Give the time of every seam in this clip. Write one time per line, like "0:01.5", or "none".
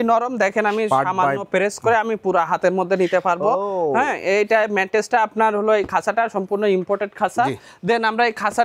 none